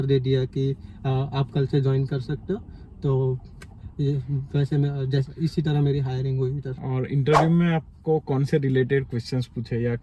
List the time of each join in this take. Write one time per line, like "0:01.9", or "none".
none